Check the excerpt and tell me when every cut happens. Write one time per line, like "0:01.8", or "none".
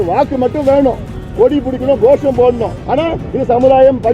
0:02.7